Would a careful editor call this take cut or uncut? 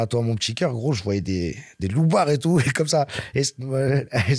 uncut